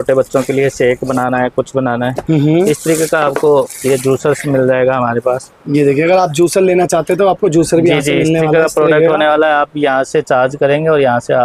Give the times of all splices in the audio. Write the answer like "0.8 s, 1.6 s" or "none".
none